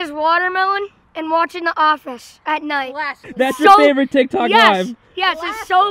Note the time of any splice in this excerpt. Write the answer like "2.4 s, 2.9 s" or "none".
3.2 s